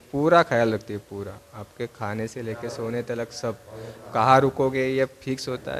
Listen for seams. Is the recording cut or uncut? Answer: uncut